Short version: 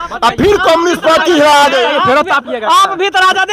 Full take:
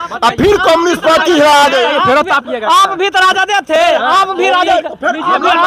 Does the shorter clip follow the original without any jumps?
yes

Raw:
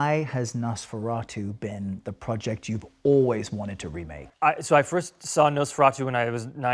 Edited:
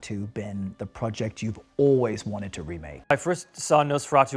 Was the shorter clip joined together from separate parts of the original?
yes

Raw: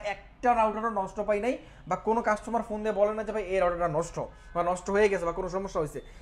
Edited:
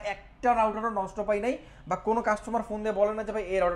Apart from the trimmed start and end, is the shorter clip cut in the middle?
no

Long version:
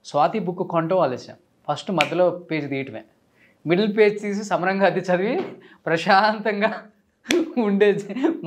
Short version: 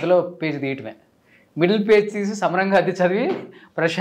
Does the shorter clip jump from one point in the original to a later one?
no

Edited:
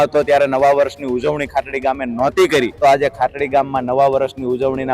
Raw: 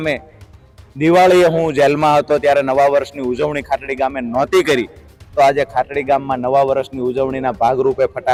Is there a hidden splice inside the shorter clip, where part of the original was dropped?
yes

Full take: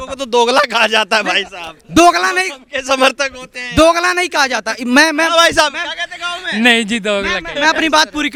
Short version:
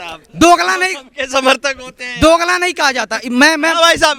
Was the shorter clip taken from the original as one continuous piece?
yes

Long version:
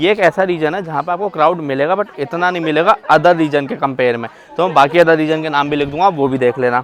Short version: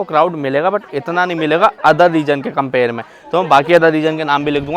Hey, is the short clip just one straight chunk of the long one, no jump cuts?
yes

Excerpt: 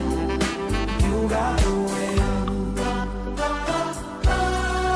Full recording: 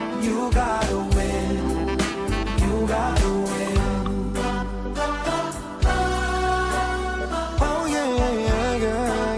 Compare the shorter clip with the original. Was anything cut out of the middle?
no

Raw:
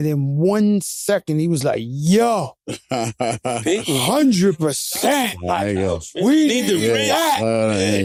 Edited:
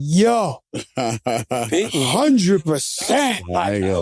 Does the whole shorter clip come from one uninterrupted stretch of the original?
yes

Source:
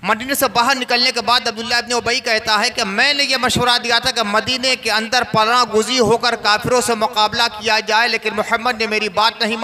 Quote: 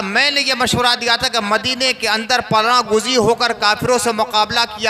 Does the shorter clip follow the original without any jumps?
yes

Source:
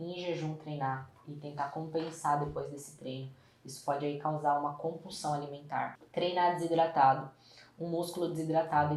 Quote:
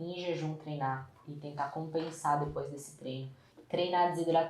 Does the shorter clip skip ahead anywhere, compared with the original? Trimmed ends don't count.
yes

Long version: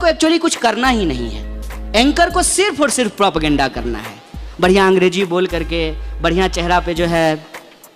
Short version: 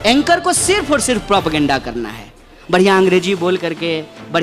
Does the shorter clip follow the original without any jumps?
yes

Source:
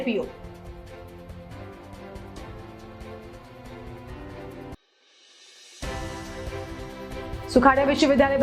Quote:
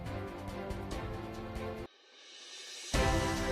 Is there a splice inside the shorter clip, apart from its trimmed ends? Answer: yes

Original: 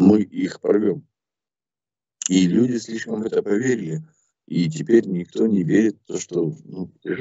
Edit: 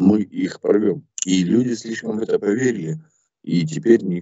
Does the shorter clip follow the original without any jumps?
no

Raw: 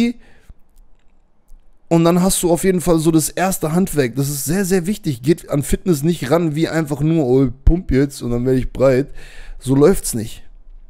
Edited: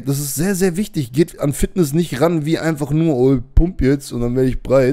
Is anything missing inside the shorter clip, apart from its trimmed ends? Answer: no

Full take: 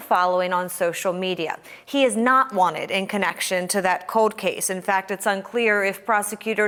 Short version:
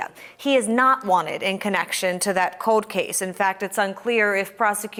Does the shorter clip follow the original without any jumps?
yes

